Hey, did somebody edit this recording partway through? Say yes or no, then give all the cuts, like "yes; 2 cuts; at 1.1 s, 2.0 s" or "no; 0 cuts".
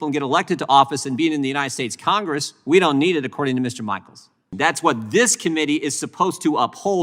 yes; 1 cut; at 4.5 s